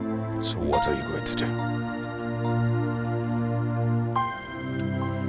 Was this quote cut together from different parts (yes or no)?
no